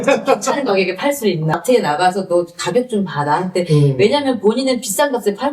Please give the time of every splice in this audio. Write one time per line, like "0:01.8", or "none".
0:01.6